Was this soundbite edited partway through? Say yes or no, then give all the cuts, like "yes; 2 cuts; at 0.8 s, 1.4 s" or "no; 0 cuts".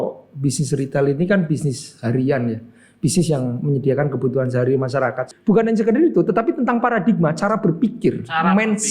yes; 1 cut; at 5.3 s